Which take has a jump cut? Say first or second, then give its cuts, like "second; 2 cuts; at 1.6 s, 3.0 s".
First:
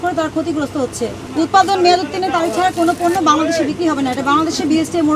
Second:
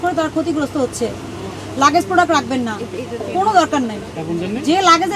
first; 1 cut; at 1.2 s